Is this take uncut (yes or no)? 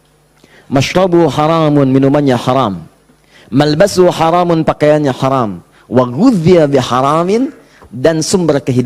yes